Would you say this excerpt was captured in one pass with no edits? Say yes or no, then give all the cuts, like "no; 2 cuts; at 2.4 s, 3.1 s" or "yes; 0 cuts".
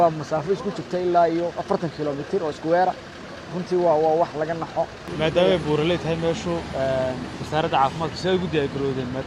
no; 1 cut; at 5.1 s